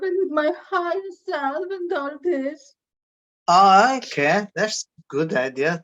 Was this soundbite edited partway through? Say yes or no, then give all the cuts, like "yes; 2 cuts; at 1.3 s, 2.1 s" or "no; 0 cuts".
no; 0 cuts